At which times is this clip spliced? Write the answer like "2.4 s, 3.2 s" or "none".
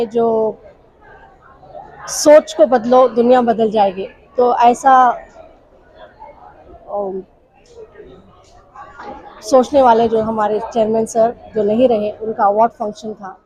none